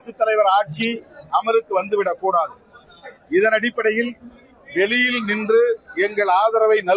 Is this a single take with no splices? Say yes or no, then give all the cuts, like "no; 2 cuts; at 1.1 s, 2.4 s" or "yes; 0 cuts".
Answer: yes; 0 cuts